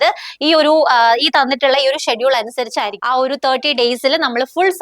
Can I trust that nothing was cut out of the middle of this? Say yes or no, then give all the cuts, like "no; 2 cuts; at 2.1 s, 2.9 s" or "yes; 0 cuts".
no; 1 cut; at 2.9 s